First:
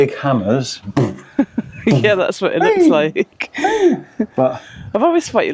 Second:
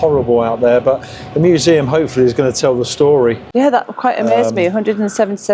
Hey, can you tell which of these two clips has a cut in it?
second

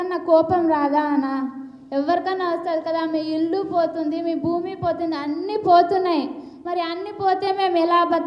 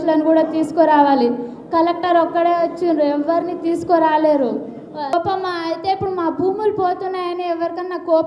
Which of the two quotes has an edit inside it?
second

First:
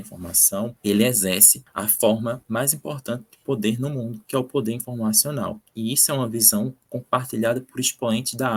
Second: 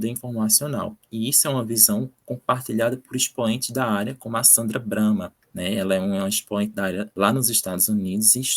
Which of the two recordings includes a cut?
second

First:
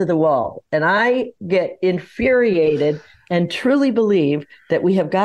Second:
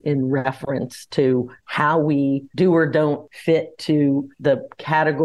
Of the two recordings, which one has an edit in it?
second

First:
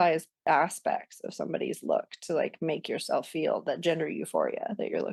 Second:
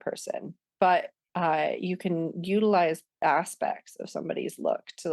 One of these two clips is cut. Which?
second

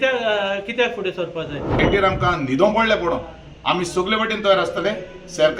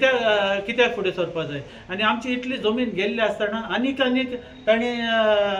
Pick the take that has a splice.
first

